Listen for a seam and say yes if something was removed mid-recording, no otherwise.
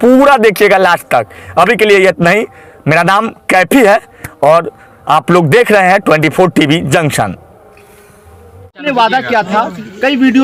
no